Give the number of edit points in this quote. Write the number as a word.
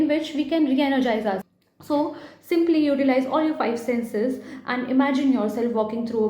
one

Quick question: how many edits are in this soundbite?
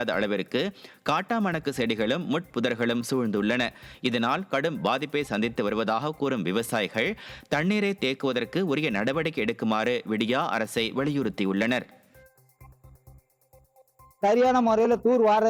zero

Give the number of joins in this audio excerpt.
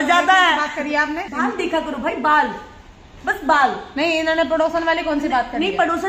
one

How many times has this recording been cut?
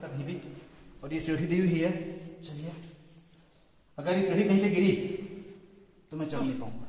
zero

